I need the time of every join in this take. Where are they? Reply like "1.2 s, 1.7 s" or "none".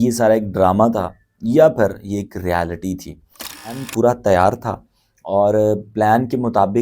3.7 s

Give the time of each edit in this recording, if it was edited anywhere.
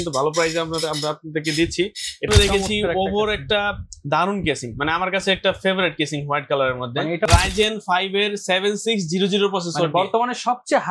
2.3 s, 7.3 s

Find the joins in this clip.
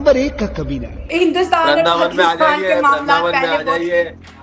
1.0 s

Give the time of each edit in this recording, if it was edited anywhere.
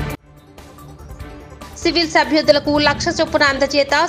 1.7 s

